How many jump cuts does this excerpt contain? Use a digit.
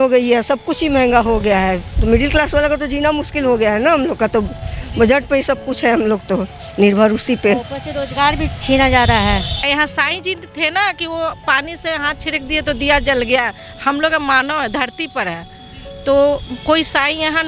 1